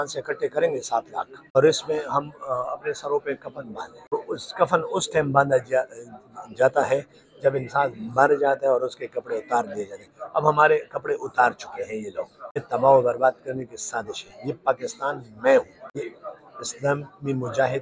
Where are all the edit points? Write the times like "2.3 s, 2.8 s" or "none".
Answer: 1.6 s, 4.1 s, 12.6 s, 15.8 s